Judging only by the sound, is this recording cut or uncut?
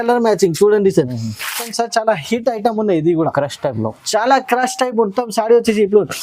cut